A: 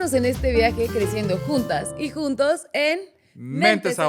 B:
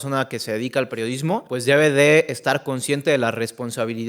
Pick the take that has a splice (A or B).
B